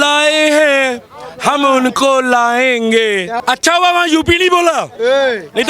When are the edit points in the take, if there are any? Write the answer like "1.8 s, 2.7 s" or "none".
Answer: 3.3 s